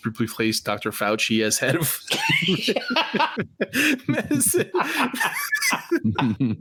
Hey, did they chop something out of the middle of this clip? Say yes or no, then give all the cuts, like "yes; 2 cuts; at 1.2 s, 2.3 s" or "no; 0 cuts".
no; 0 cuts